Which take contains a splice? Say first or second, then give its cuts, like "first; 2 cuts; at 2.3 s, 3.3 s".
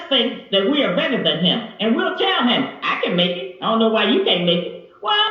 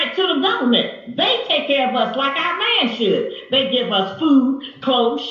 second; 1 cut; at 4.1 s